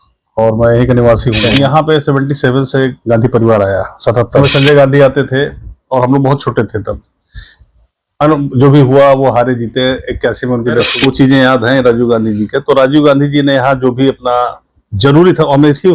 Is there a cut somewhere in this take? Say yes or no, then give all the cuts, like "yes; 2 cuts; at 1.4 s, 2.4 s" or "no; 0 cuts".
yes; 3 cuts; at 1.4 s, 4.4 s, 10.9 s